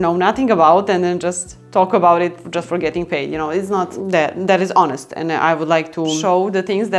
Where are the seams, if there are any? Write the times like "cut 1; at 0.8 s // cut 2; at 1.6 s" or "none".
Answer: cut 1; at 2.4 s // cut 2; at 3.9 s // cut 3; at 6.2 s